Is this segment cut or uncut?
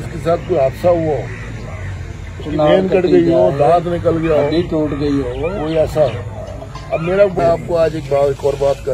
cut